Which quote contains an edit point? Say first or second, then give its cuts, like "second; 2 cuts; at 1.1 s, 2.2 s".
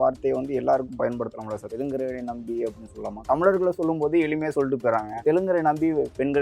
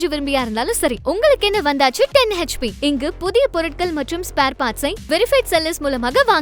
first; 3 cuts; at 1.7 s, 3.2 s, 5.2 s